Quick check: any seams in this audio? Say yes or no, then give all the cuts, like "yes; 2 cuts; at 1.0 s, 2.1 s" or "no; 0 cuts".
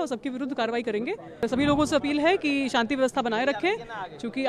yes; 1 cut; at 1.4 s